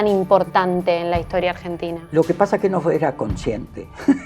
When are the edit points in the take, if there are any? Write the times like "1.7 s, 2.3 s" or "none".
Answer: 1.9 s

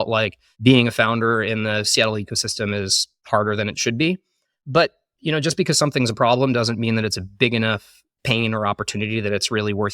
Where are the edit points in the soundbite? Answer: none

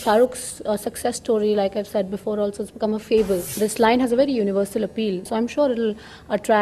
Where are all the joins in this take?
3.5 s, 5.3 s

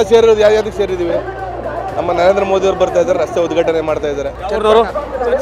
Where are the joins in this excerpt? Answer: 4.4 s

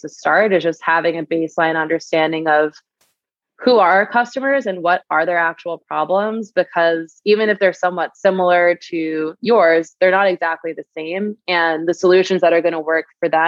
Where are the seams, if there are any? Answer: none

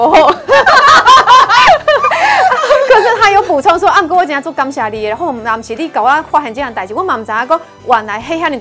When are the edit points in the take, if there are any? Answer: none

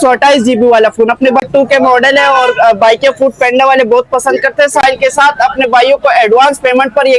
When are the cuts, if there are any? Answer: 1.4 s, 4.8 s

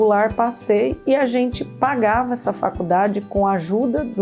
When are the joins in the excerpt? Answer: none

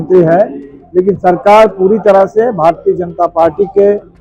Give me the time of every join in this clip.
none

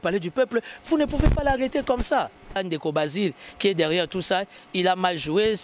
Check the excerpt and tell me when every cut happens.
2.6 s

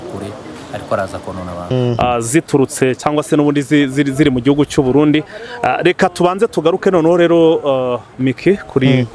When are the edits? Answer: 1.7 s

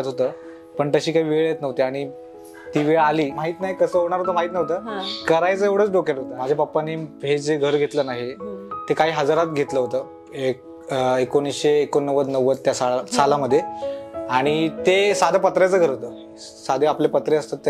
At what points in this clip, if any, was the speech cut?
3.4 s, 6.3 s

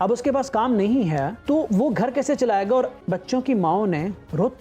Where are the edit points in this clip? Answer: 3.0 s

